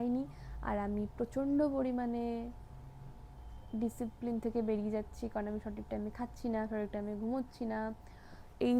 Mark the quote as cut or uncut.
uncut